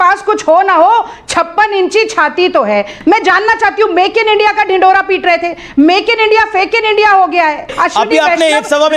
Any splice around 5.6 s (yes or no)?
no